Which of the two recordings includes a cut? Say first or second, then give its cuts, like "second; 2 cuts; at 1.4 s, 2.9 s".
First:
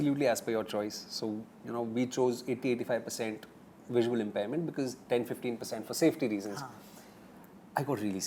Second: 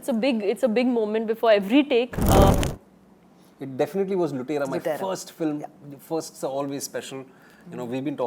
second; 1 cut; at 2.5 s